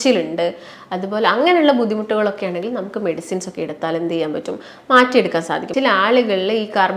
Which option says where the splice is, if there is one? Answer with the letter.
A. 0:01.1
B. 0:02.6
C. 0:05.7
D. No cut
C